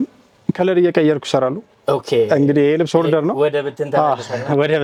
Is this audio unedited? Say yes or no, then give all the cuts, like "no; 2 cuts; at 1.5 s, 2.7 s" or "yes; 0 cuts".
yes; 0 cuts